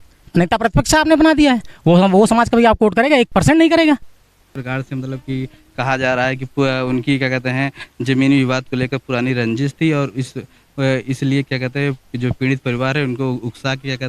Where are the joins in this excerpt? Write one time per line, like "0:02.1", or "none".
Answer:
0:04.5

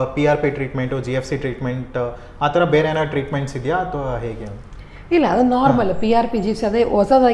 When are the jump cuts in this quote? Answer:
none

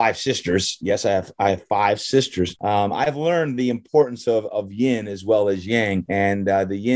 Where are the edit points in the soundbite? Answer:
0:02.6
0:06.0

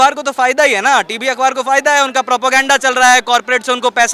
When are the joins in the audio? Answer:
none

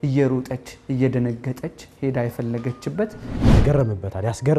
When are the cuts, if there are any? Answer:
0:03.3

